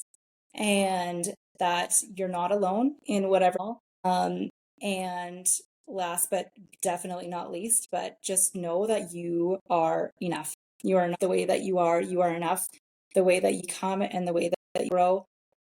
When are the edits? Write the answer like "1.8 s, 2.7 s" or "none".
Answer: 3.5 s, 11.1 s, 13.6 s

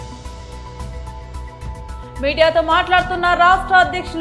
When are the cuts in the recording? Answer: none

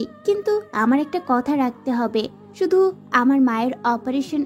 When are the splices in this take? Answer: none

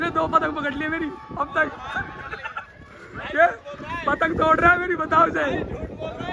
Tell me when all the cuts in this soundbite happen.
none

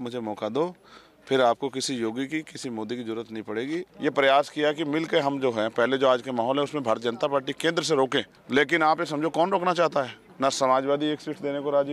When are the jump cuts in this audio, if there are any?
3.9 s, 8.4 s, 10.2 s

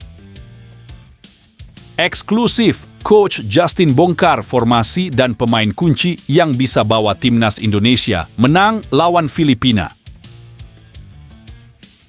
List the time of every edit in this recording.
2.0 s, 9.9 s

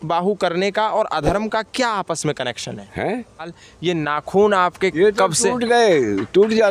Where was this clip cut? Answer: 3.5 s

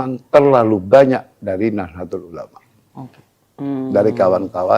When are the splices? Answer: none

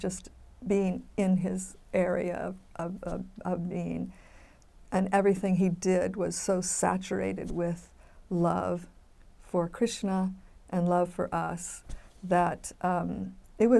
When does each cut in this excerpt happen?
none

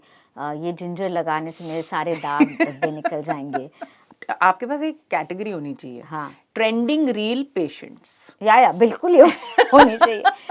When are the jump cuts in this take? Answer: 4.1 s

